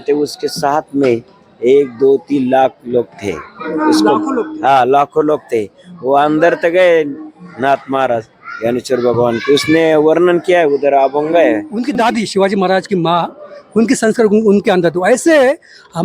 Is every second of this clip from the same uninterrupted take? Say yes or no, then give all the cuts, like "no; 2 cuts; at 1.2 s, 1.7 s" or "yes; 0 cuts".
no; 1 cut; at 11.8 s